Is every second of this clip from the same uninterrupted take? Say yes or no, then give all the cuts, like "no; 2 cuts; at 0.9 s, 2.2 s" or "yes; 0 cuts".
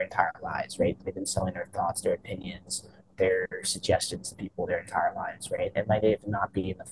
yes; 0 cuts